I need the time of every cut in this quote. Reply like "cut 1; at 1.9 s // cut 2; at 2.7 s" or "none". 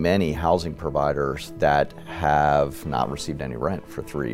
none